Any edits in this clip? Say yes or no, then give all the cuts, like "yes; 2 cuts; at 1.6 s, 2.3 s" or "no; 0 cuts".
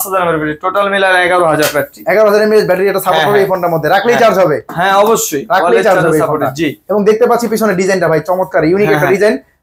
no; 0 cuts